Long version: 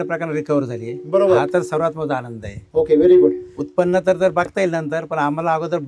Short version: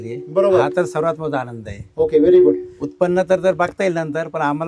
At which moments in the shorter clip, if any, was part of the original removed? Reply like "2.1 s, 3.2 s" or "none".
none